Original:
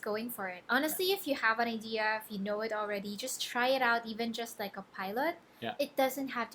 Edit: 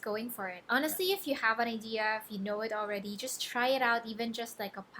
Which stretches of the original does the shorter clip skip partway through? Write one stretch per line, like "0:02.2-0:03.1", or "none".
none